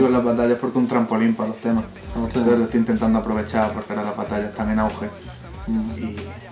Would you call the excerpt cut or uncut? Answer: uncut